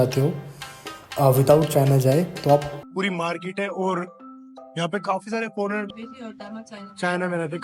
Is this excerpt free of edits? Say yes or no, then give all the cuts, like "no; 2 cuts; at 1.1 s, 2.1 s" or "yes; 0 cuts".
no; 2 cuts; at 2.8 s, 5.9 s